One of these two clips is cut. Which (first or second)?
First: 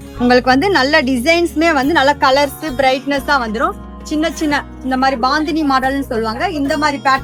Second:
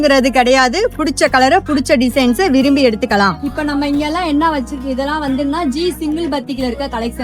second